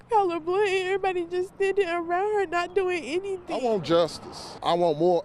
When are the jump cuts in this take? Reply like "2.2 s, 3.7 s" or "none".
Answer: 3.5 s